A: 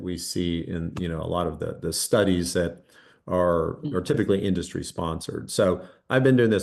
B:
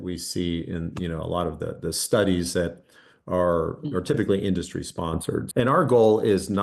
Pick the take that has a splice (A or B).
B